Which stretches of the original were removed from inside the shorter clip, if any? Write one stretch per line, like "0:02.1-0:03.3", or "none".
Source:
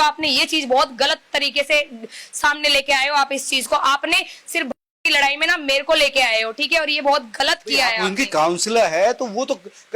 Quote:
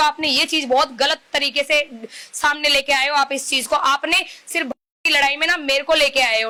none